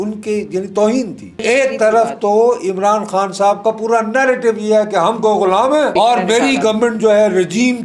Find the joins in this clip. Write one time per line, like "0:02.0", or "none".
0:01.4
0:05.9